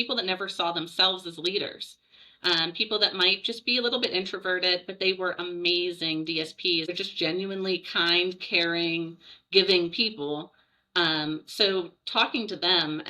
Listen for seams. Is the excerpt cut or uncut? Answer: cut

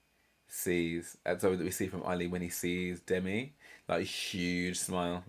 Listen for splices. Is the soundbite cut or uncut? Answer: uncut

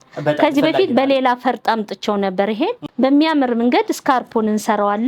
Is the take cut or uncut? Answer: cut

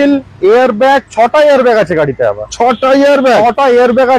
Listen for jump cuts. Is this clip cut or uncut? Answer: uncut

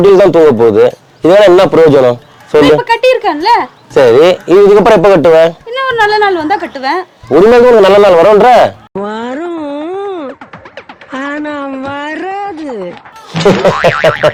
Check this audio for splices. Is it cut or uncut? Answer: uncut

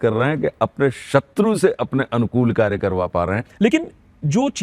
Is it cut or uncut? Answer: cut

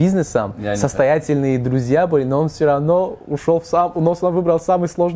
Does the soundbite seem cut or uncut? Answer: uncut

